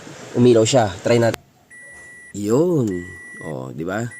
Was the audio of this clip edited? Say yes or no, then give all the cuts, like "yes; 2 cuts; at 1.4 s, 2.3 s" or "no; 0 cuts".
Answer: yes; 1 cut; at 1.3 s